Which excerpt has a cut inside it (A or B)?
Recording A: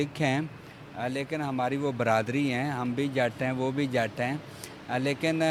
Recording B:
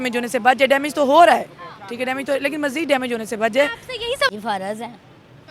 B